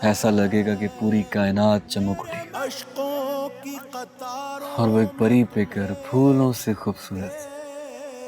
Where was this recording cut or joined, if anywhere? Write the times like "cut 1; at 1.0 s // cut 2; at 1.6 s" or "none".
cut 1; at 2.5 s

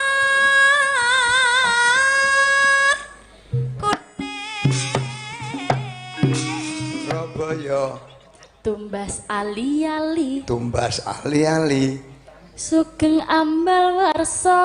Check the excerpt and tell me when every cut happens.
cut 1; at 7.2 s

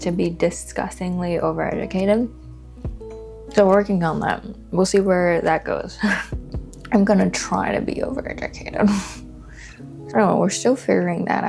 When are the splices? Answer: none

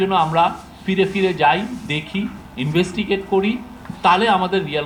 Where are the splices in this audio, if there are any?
none

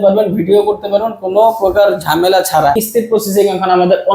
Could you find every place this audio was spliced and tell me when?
cut 1; at 2.8 s

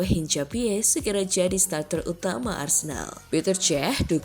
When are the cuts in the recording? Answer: cut 1; at 3.1 s

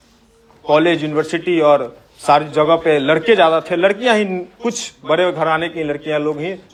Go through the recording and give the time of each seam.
none

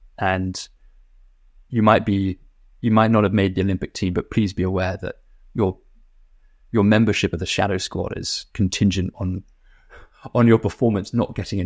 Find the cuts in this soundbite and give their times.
none

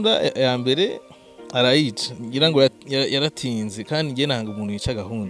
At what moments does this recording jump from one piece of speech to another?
none

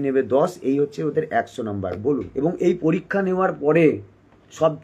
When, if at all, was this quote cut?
cut 1; at 2.3 s

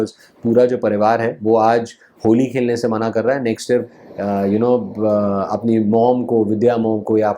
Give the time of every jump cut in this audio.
cut 1; at 4.0 s

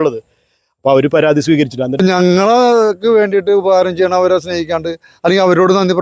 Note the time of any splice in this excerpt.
cut 1; at 2.0 s

